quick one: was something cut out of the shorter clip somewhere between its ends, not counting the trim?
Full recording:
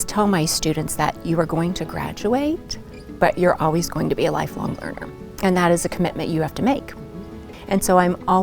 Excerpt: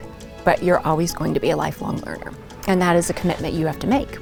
no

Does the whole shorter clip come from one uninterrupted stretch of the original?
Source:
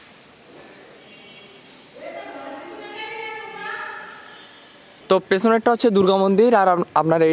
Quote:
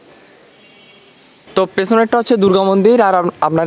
no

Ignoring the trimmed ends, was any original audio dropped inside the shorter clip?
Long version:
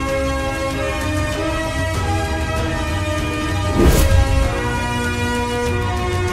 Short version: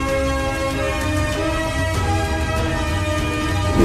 no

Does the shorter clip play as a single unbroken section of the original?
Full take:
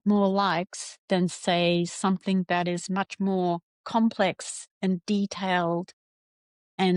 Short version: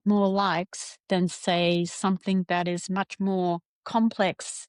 yes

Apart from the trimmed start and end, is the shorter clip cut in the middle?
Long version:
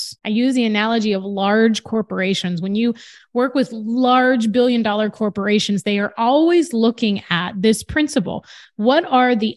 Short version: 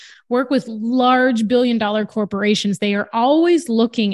no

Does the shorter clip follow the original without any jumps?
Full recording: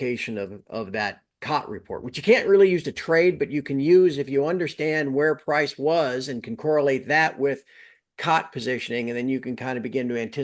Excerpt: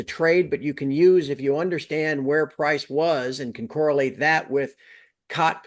yes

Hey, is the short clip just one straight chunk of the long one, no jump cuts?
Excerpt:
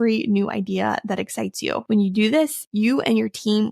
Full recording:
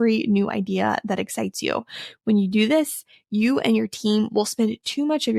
no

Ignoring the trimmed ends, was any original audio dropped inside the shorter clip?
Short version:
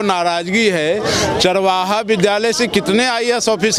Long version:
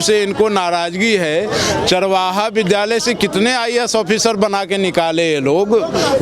no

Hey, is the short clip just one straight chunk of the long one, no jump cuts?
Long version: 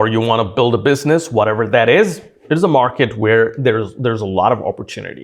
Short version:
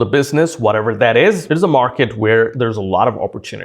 no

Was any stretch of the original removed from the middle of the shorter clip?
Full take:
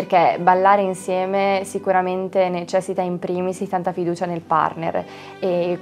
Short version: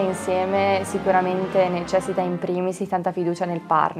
no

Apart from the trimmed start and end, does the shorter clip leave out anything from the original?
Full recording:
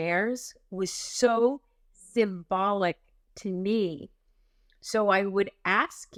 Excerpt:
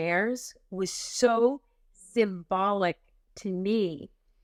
no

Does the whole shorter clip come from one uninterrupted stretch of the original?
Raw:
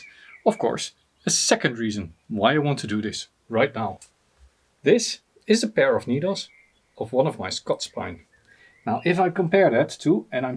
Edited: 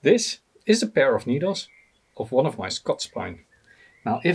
yes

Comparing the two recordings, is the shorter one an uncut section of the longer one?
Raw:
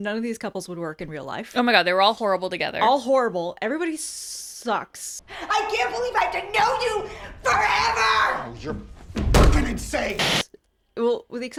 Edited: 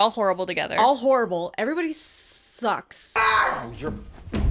no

